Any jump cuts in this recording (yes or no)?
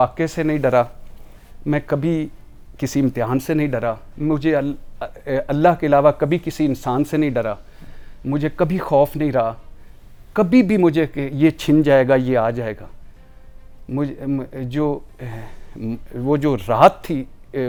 no